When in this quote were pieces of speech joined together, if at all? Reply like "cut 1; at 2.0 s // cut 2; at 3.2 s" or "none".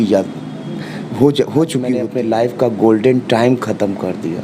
cut 1; at 2.1 s